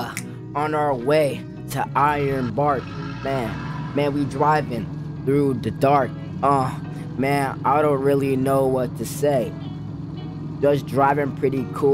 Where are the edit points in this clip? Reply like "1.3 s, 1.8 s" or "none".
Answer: none